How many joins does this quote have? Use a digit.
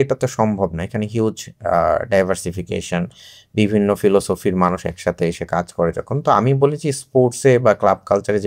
0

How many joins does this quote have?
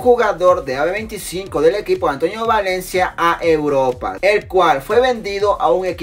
0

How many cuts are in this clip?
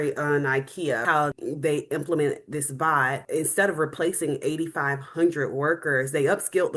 2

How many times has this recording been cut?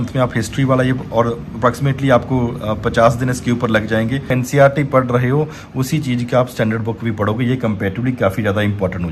1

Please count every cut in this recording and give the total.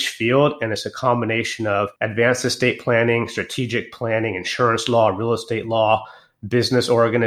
1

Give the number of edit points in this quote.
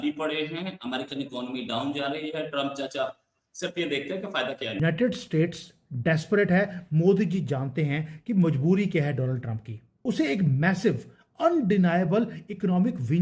1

